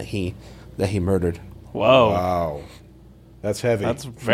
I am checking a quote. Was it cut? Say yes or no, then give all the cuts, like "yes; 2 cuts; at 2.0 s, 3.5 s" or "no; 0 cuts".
no; 0 cuts